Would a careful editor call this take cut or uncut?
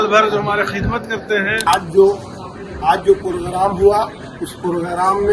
cut